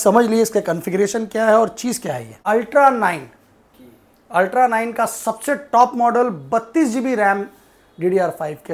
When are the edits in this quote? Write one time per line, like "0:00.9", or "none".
0:02.3